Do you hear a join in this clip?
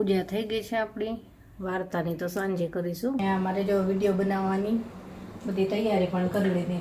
yes; 1 cut; at 3.2 s

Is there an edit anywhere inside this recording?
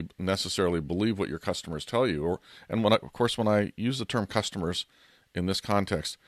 no; 0 cuts

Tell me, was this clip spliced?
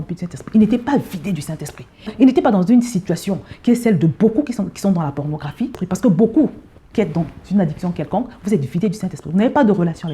yes; 1 cut; at 5.8 s

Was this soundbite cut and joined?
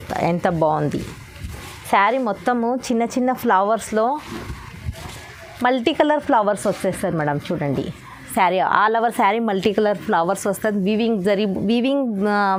no; 0 cuts

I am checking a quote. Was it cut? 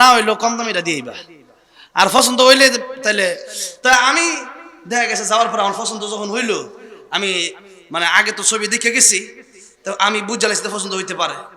no; 0 cuts

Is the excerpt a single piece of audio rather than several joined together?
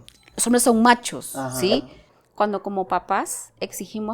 no; 1 cut; at 2.2 s

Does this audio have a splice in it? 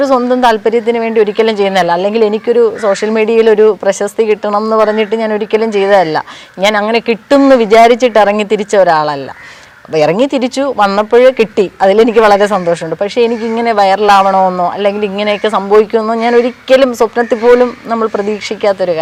no; 0 cuts

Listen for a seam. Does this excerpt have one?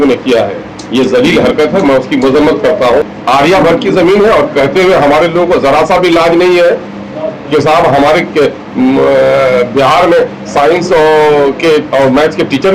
yes; 1 cut; at 3.1 s

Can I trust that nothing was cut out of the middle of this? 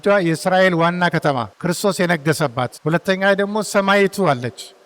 no; 2 cuts; at 1.5 s, 2.8 s

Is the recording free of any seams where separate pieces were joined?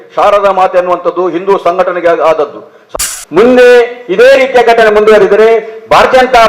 no; 1 cut; at 2.9 s

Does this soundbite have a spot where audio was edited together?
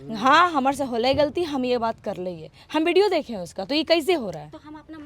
no; 0 cuts

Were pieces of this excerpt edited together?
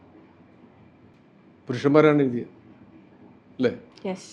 yes; 1 cut; at 1.1 s

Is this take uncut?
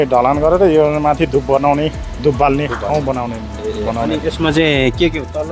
yes; 0 cuts

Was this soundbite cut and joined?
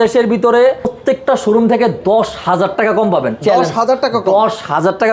yes; 1 cut; at 1.0 s

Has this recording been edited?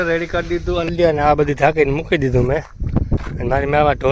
yes; 1 cut; at 0.9 s

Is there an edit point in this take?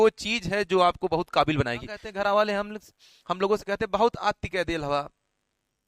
yes; 1 cut; at 2.0 s

